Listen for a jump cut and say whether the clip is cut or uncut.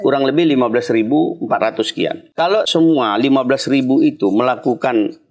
cut